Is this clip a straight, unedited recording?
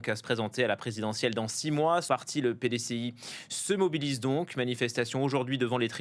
no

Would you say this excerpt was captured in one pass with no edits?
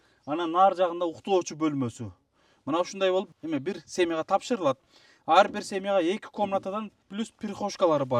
no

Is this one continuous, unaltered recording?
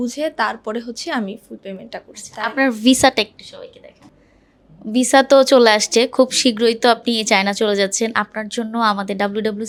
yes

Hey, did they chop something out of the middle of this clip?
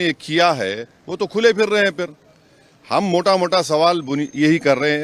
no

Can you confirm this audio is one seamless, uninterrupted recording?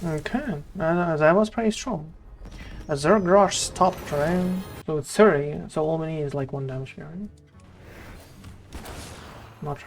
no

